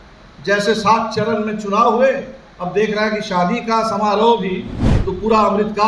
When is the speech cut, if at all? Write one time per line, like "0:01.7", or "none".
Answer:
0:04.9